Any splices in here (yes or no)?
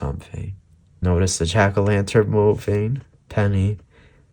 yes